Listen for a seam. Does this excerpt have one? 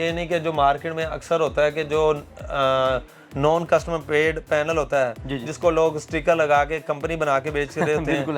no; 0 cuts

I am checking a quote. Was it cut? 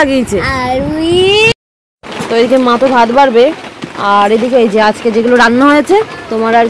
yes; 1 cut; at 1.5 s

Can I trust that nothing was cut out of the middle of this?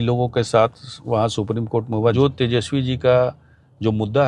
no; 1 cut; at 2.1 s

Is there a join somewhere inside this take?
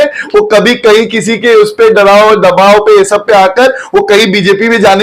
no; 0 cuts

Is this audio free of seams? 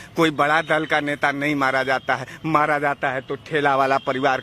yes; 0 cuts

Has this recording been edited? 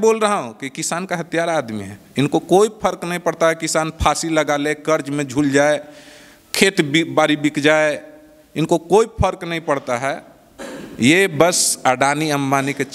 no; 0 cuts

